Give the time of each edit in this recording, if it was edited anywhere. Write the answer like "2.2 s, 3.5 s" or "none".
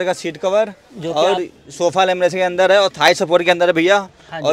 none